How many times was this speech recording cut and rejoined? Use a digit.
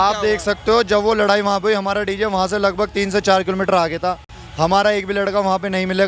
0